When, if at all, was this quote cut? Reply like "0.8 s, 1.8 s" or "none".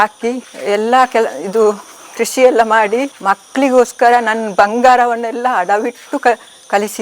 3.1 s